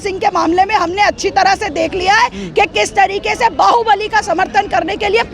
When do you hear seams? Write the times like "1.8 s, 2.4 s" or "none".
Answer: none